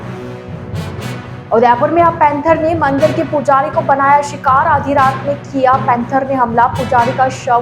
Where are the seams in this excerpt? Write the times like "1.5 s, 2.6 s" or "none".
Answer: 1.4 s